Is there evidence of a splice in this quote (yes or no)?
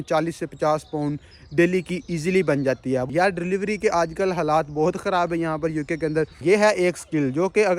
yes